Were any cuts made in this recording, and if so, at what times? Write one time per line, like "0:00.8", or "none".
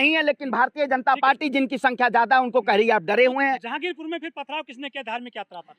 none